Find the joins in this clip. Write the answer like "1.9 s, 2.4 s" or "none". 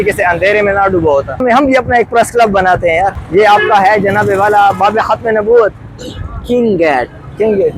1.4 s, 3.2 s